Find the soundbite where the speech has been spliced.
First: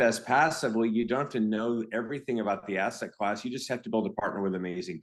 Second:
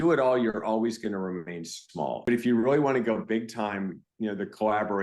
second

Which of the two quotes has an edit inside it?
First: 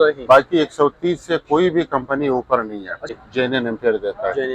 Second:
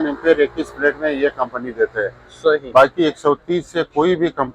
first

